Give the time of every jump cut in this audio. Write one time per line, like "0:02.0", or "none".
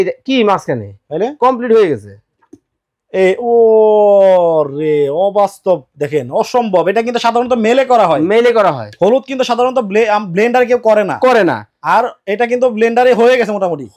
none

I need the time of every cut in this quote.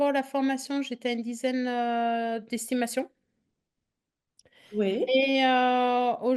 none

